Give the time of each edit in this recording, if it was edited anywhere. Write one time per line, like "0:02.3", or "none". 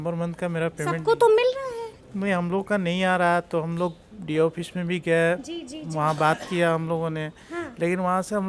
none